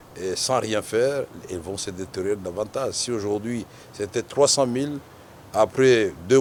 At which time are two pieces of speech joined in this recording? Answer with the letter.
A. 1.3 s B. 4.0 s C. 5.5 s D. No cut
D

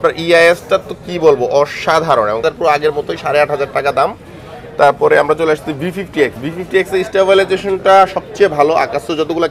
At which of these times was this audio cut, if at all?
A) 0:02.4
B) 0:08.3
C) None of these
A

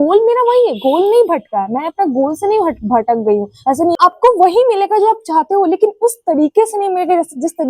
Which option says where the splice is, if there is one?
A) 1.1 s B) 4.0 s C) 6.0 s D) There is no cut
B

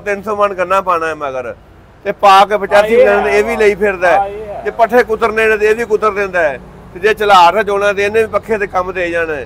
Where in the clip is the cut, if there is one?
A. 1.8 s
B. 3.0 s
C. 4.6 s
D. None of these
D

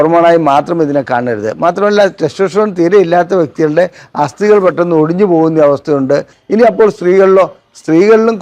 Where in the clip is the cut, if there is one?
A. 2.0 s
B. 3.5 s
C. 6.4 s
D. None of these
C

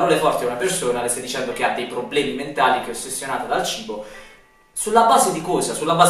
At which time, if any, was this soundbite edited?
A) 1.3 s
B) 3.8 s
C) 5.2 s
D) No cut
D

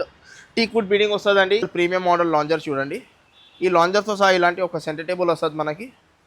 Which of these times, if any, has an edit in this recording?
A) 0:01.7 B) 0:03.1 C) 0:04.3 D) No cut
A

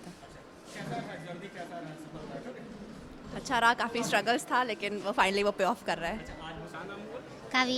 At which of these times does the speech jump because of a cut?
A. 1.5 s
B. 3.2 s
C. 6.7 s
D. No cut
C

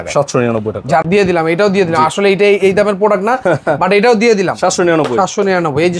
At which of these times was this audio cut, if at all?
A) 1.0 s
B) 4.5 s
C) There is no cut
A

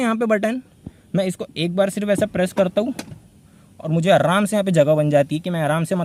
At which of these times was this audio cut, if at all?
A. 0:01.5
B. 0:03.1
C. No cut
C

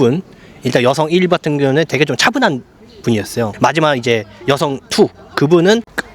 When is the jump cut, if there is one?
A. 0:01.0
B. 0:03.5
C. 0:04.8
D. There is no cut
B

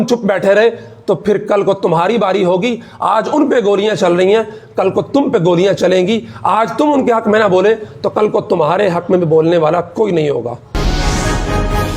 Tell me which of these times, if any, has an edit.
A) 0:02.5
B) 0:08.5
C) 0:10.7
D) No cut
C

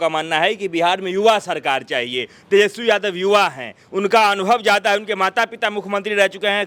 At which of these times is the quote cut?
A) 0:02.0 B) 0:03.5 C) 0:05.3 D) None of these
D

